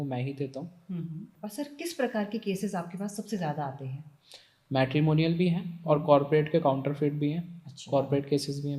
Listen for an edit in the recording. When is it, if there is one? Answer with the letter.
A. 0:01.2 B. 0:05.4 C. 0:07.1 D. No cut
A